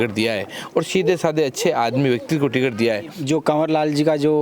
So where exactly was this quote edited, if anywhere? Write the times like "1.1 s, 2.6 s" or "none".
3.2 s